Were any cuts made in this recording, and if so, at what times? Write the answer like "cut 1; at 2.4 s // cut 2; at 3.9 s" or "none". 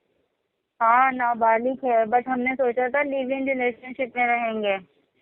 none